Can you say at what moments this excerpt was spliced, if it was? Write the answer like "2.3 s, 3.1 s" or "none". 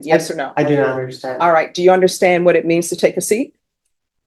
none